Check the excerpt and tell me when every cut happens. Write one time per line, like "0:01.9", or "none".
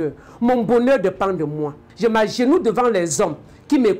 0:01.9